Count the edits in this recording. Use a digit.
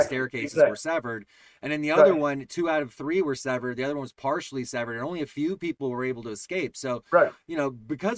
0